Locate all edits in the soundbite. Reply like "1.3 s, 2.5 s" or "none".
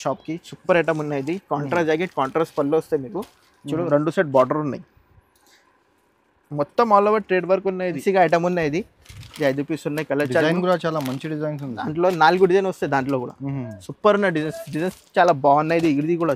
8.0 s